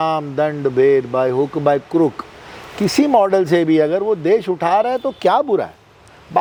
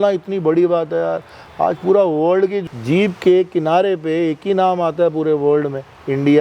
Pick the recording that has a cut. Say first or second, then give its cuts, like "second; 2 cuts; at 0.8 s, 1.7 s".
second; 1 cut; at 2.6 s